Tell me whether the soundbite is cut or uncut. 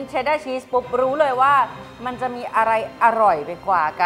uncut